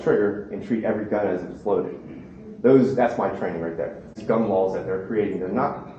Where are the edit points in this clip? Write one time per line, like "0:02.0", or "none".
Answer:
0:04.2